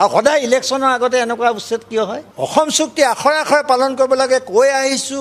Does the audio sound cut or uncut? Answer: cut